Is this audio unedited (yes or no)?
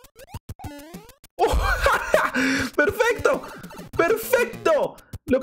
yes